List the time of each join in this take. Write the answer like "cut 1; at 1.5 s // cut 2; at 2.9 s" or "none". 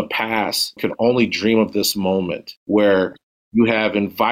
cut 1; at 0.8 s // cut 2; at 2.5 s